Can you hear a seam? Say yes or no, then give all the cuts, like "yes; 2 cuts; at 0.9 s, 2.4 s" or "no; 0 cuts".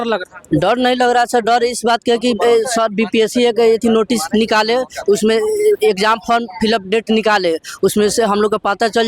no; 0 cuts